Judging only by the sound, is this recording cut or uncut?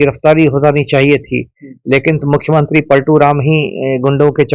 uncut